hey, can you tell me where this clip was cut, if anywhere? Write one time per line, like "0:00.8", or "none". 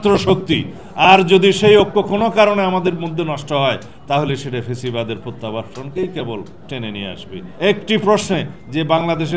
0:07.4